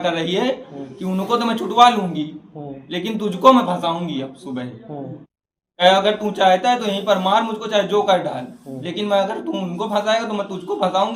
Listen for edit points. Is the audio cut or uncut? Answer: uncut